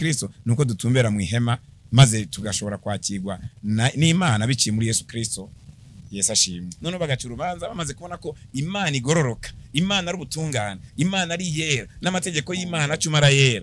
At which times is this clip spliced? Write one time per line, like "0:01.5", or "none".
0:06.7